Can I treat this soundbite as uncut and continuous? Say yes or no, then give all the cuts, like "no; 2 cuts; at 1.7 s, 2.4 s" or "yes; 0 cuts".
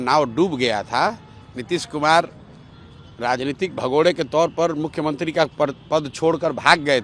yes; 0 cuts